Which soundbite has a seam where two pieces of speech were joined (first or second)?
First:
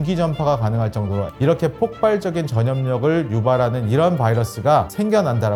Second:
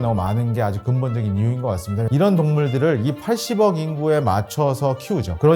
second